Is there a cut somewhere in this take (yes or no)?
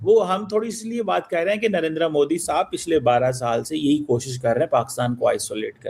no